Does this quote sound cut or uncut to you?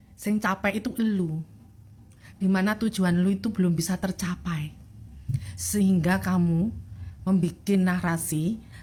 uncut